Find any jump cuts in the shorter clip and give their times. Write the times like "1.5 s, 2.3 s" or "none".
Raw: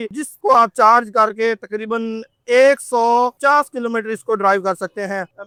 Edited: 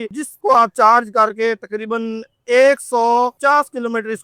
none